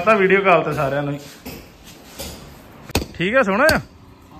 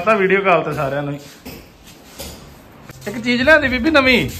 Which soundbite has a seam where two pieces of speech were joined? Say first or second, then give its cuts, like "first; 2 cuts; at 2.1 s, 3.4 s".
second; 1 cut; at 3.0 s